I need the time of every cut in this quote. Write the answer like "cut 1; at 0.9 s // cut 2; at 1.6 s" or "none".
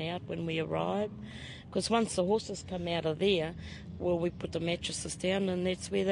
none